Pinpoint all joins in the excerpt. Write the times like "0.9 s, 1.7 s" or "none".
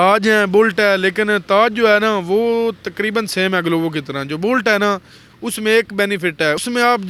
none